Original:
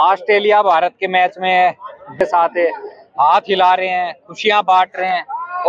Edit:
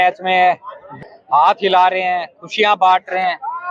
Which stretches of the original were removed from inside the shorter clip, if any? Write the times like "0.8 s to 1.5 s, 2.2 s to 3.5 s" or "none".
2.1 s to 2.8 s